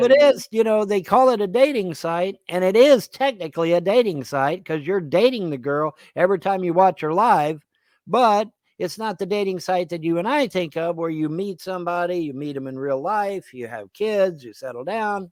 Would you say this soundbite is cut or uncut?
uncut